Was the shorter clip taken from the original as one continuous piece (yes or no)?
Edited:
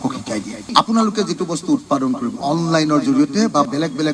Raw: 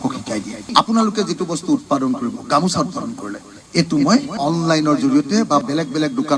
no